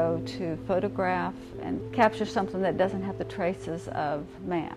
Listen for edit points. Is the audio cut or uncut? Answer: cut